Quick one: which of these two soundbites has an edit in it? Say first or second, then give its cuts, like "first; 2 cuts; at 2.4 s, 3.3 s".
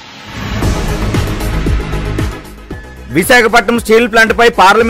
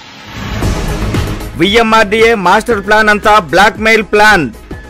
first; 1 cut; at 1.4 s